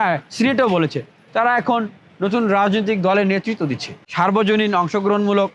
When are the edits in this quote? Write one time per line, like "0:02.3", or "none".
0:04.0